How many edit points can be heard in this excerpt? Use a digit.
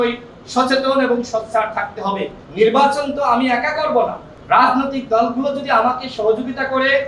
2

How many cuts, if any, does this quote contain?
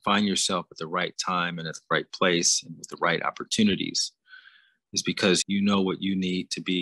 1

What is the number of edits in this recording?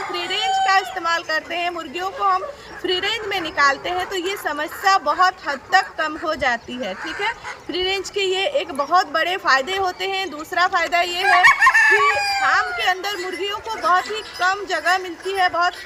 0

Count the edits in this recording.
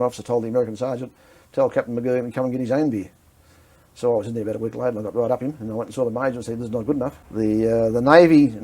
1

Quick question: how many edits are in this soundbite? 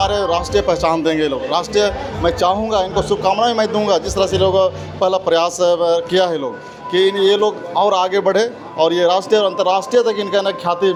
0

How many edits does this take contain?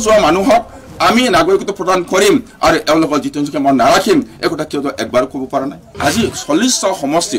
1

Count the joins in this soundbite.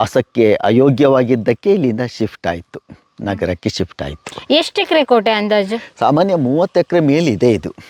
0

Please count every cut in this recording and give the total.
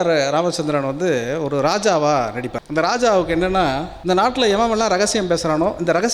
2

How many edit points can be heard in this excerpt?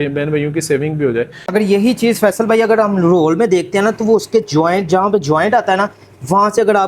1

